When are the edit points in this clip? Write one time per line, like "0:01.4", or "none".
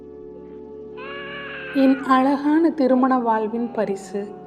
0:01.6